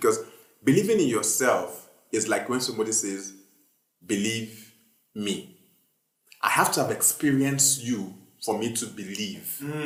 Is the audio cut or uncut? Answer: uncut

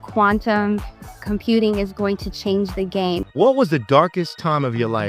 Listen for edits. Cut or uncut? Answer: cut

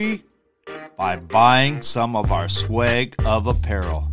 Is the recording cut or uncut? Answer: uncut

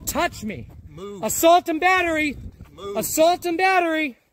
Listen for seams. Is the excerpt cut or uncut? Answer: uncut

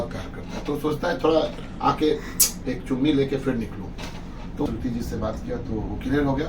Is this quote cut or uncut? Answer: cut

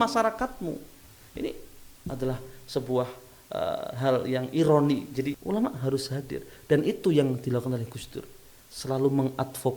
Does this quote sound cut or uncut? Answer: cut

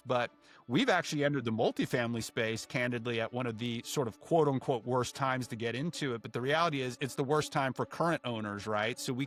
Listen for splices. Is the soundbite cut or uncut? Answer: uncut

